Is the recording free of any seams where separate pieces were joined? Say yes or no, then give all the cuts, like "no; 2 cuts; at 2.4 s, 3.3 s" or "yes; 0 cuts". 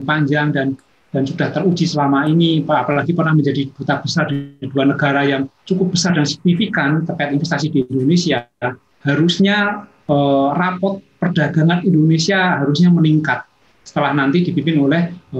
yes; 0 cuts